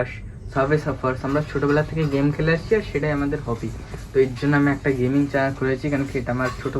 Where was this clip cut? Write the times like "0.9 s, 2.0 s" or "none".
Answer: none